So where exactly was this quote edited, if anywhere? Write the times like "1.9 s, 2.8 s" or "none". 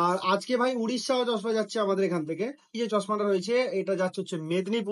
2.8 s